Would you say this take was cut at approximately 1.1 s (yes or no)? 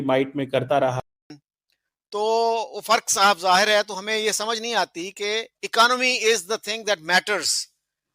yes